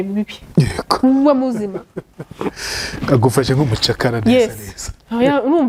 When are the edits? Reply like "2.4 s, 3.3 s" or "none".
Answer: none